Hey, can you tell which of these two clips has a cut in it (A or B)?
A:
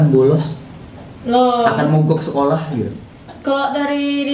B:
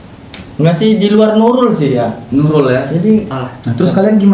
B